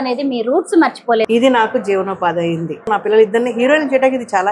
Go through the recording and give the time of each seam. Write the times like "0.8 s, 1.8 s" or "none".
1.3 s, 2.9 s